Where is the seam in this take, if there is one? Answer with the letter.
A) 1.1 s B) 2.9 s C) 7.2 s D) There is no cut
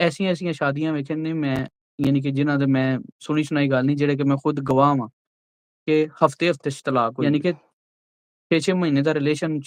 C